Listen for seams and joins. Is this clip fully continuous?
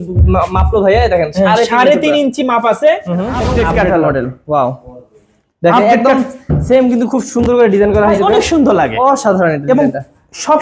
no; 1 cut; at 3.4 s

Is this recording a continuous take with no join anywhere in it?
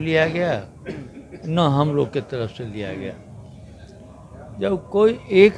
yes; 0 cuts

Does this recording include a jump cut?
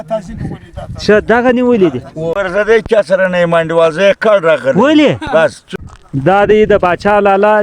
yes; 2 cuts; at 2.3 s, 5.6 s

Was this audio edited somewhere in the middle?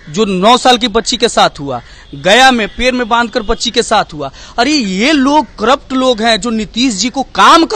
no; 0 cuts

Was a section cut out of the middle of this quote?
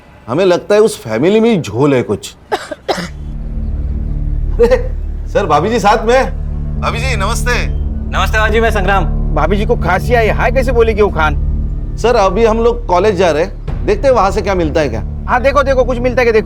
no; 0 cuts

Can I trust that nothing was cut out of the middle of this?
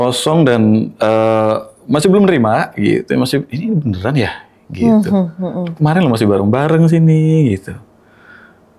yes; 0 cuts

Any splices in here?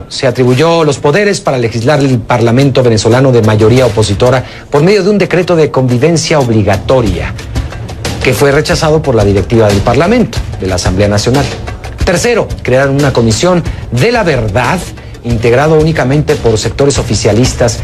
yes; 1 cut; at 14.0 s

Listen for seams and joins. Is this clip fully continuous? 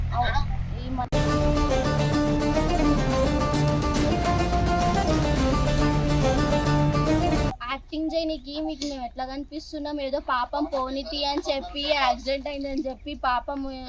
no; 1 cut; at 7.5 s

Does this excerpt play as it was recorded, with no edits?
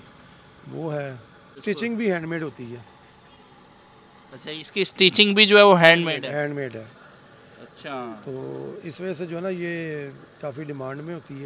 no; 1 cut; at 1.6 s

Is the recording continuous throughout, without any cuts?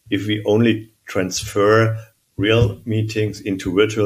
yes; 0 cuts

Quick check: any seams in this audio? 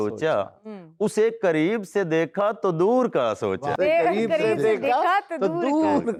no; 0 cuts

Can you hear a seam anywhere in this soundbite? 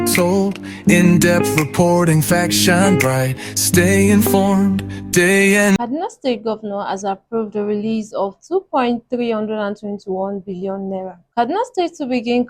yes; 1 cut; at 5.8 s

